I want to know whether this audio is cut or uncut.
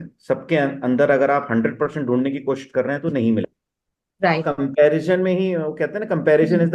cut